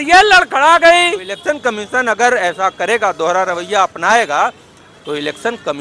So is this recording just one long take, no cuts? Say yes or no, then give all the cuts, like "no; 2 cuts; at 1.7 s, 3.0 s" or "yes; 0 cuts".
no; 1 cut; at 1.3 s